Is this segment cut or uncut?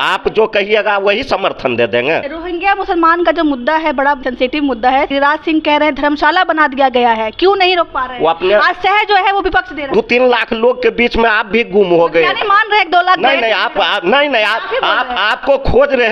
cut